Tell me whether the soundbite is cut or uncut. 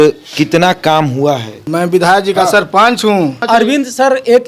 cut